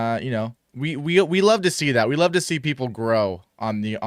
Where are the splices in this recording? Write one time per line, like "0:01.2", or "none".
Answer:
none